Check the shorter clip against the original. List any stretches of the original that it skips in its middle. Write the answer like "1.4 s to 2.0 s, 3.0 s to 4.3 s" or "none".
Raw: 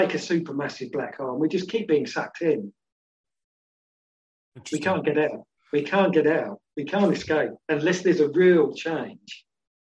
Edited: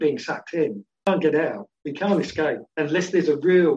2.9 s to 6.0 s